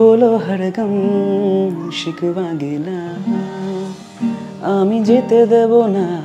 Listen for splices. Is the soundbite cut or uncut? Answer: cut